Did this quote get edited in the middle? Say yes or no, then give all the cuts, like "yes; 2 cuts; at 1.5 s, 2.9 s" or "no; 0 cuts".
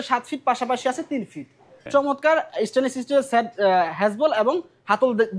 yes; 1 cut; at 1.9 s